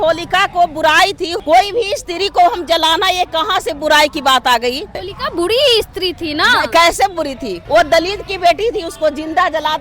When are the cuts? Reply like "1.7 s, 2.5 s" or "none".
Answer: 1.3 s, 5.1 s, 7.6 s